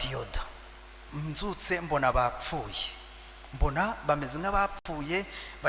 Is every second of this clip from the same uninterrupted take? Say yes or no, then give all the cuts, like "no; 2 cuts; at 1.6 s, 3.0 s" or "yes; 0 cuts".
no; 1 cut; at 1.1 s